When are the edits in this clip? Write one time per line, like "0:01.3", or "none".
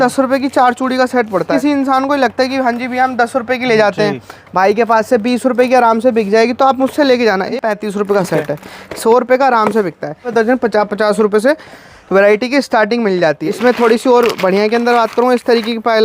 0:01.5
0:07.5
0:10.3
0:13.5